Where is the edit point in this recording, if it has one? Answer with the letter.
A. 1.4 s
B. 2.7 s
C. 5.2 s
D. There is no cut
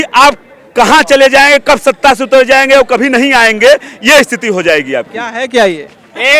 C